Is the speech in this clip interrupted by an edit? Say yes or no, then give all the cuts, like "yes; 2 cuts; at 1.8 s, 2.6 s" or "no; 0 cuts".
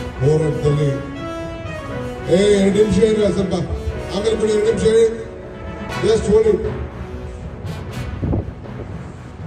yes; 2 cuts; at 1.1 s, 2.3 s